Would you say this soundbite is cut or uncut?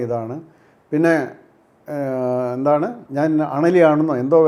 uncut